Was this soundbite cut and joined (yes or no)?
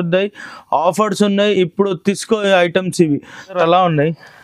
yes